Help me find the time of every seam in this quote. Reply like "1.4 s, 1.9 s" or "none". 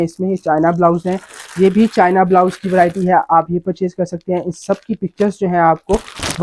none